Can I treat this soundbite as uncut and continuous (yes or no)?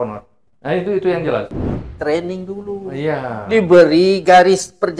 no